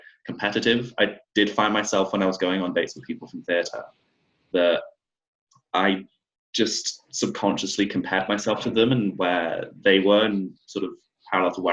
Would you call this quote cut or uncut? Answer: uncut